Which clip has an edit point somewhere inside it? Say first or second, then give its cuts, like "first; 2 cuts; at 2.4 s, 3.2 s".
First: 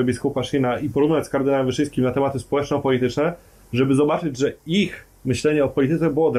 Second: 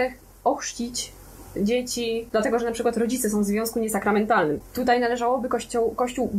second; 2 cuts; at 2.2 s, 4.7 s